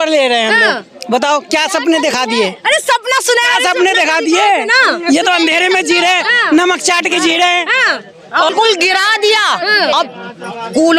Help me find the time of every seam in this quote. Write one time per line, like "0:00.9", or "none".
0:08.5